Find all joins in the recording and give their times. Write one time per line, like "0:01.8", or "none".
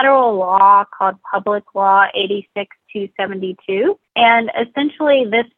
0:04.1